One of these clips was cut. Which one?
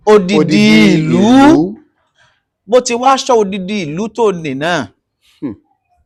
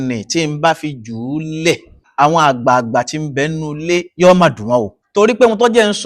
second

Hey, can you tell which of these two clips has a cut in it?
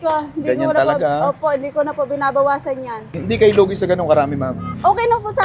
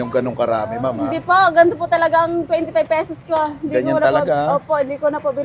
first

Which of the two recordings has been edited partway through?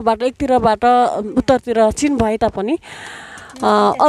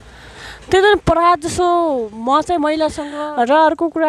second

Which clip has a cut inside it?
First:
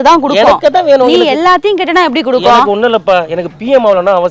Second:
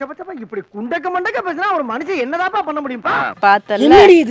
second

